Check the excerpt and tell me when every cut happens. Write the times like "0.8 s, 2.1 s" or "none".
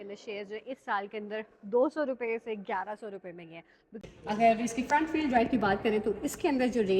4.0 s

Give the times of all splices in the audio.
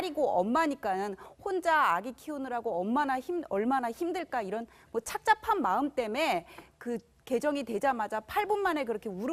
none

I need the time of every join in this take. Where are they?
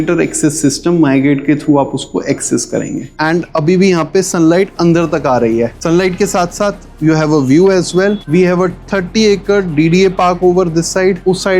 3.2 s, 5.8 s

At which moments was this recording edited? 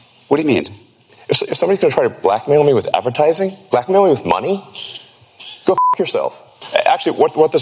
1.1 s, 6.5 s

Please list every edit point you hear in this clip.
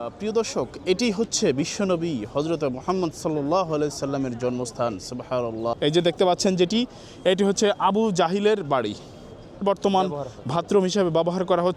5.7 s, 9.6 s

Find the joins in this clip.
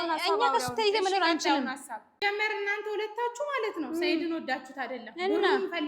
2.2 s

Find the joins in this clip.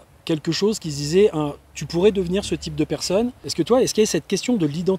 3.4 s

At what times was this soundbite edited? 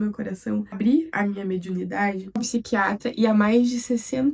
1.1 s, 2.5 s

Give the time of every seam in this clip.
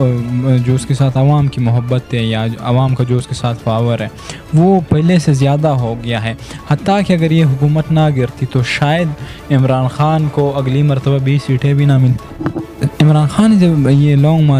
12.6 s

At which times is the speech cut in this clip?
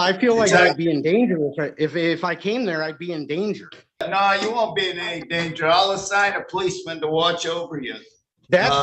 4.0 s

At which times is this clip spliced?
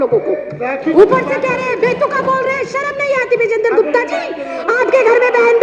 0.9 s

